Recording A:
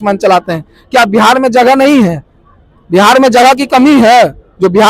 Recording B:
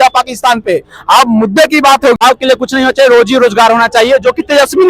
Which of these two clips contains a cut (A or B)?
B